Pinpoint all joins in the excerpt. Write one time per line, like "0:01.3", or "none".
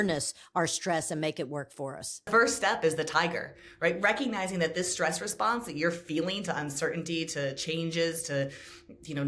0:02.3